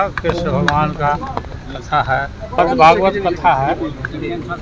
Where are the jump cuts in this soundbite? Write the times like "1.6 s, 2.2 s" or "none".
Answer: 2.6 s